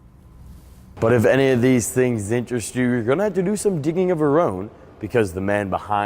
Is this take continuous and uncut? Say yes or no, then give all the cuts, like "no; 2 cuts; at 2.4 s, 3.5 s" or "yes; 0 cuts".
no; 1 cut; at 0.9 s